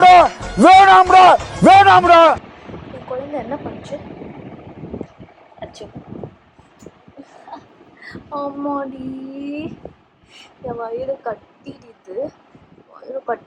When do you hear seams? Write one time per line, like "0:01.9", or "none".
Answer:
0:02.4